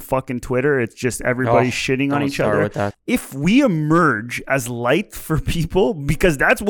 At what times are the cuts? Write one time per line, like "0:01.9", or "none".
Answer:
0:02.9